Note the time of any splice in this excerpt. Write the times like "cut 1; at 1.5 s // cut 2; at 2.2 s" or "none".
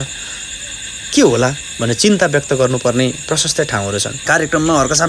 cut 1; at 4.1 s